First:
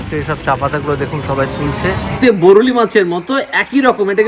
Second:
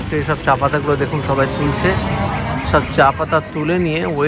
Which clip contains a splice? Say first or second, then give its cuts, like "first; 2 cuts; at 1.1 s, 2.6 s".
first; 1 cut; at 2.2 s